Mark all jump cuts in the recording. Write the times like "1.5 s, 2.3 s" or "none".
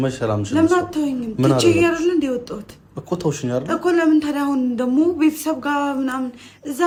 none